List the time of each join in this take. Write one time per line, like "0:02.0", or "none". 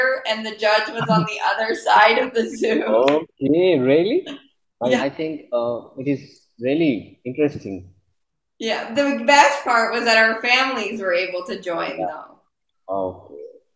0:05.0